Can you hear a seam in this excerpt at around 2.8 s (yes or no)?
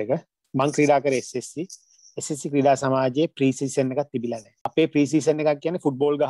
no